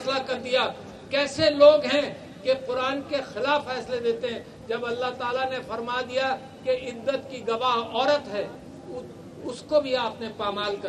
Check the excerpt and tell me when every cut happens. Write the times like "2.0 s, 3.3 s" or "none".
none